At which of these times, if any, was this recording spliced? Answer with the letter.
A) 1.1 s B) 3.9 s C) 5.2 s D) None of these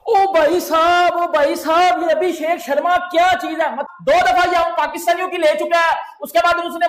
B